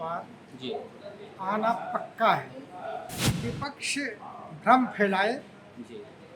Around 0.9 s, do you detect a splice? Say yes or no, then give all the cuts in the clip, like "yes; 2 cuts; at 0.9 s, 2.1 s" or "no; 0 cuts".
no; 1 cut; at 3.2 s